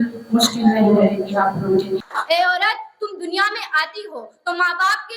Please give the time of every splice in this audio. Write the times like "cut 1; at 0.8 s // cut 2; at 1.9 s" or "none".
cut 1; at 2.1 s

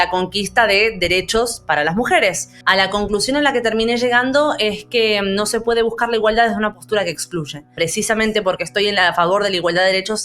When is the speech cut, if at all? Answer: cut 1; at 2.5 s // cut 2; at 7.7 s

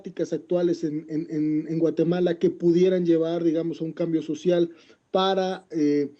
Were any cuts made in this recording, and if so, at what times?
cut 1; at 2.6 s

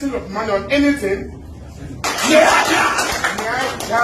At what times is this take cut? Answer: cut 1; at 2.0 s

